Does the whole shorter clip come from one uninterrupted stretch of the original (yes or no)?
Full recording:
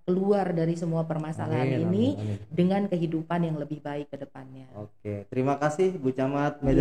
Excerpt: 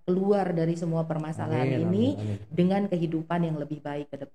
yes